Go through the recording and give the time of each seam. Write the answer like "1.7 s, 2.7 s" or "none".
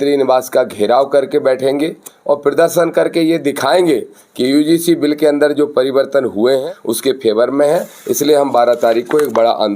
6.6 s